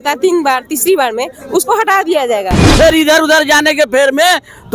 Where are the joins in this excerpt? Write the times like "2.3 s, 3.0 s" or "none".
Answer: 2.6 s